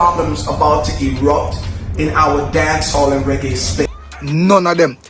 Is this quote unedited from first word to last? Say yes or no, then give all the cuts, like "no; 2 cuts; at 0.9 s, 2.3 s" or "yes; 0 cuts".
no; 1 cut; at 4.0 s